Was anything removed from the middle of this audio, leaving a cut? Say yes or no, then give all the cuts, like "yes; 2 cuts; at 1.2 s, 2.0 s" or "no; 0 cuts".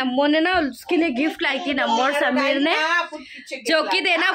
no; 0 cuts